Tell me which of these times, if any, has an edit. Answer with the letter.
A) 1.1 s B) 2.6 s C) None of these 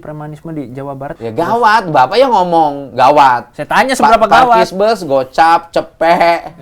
A